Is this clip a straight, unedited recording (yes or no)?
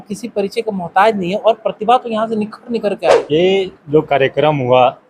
no